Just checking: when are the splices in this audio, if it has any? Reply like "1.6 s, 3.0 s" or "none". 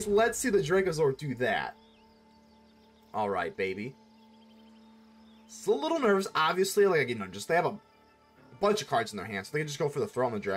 none

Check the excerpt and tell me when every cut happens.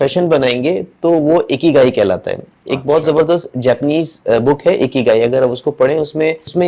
none

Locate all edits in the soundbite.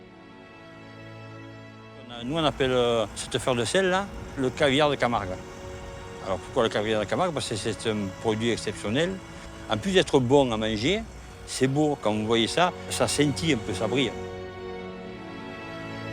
2.2 s, 9.5 s

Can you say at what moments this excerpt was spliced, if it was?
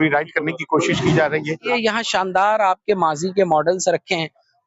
1.6 s

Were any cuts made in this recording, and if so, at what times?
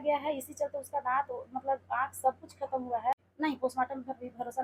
3.3 s

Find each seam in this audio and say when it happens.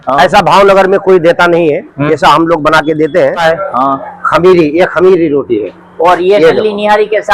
3.4 s

